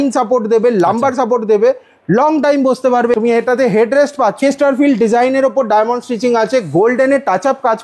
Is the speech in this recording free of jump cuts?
no; 2 cuts; at 3.1 s, 4.4 s

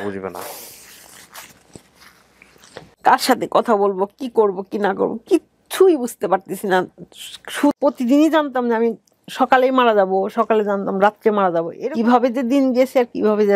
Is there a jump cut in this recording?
yes; 2 cuts; at 7.7 s, 11.7 s

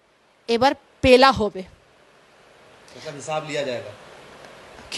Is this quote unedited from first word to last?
yes; 0 cuts

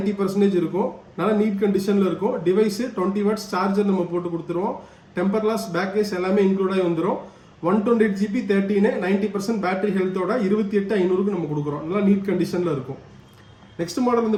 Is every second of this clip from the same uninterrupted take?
yes; 0 cuts

